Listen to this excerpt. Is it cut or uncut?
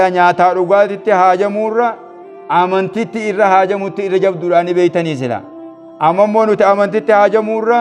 uncut